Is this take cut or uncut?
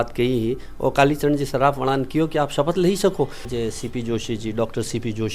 cut